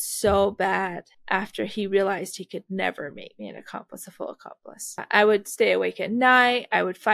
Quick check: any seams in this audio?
yes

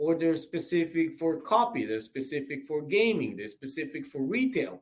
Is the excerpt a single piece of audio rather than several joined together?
yes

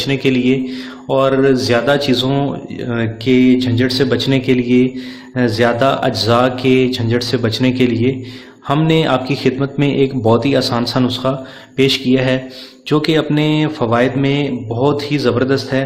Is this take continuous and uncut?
yes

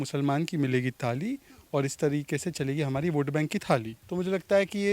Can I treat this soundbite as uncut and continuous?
no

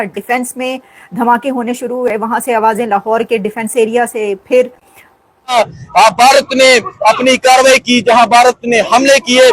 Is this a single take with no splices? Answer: no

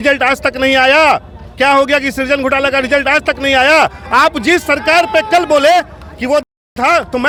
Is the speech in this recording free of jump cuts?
yes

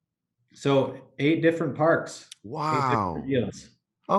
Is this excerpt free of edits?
yes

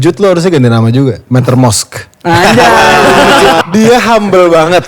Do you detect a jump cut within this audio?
yes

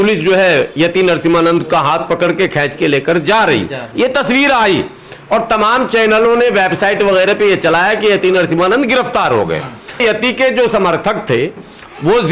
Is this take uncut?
no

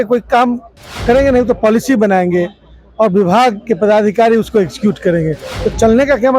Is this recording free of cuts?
yes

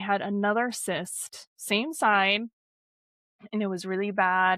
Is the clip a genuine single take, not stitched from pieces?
yes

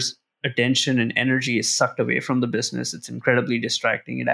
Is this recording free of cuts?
yes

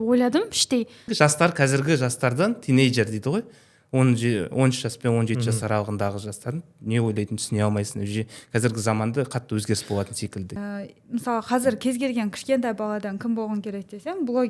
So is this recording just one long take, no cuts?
no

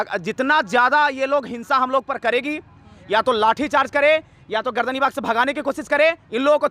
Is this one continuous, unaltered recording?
yes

